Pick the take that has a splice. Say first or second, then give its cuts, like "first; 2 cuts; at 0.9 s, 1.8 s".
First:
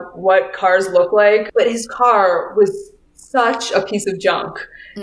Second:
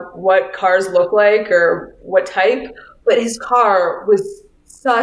first; 1 cut; at 1.5 s